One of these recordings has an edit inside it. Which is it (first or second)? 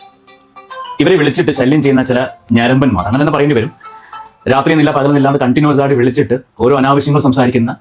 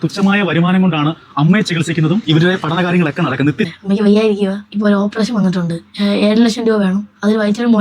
second